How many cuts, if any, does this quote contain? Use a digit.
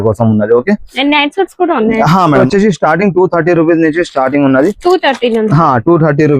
1